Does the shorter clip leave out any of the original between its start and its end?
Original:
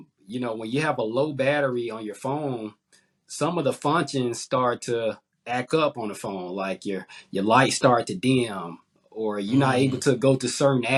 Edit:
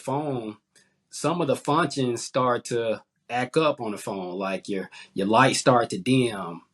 no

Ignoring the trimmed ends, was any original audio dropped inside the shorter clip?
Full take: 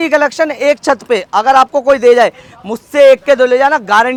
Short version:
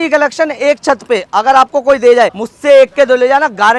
yes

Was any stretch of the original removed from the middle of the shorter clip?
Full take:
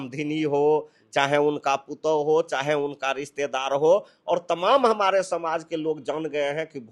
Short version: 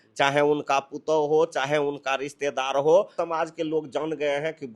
yes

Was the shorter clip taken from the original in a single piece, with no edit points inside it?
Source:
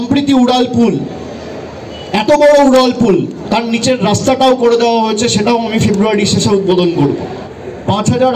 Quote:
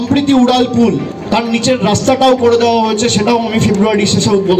no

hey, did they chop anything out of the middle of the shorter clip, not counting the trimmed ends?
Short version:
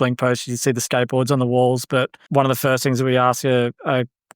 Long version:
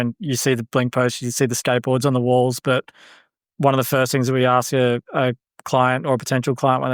yes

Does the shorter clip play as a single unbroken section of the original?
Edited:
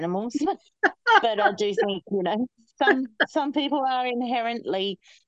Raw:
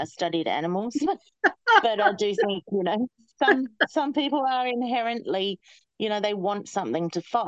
yes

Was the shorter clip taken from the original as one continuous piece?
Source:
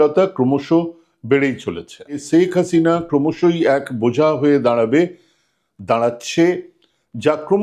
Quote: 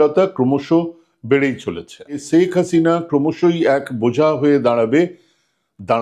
yes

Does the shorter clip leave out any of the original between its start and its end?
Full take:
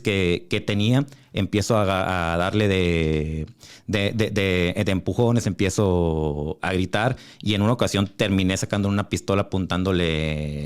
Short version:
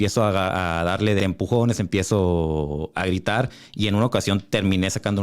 yes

